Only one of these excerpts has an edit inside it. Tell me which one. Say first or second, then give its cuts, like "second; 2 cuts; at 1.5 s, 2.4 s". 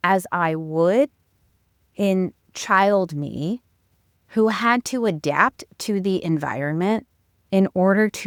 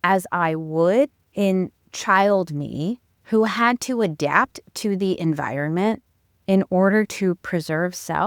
second; 2 cuts; at 1.2 s, 3.1 s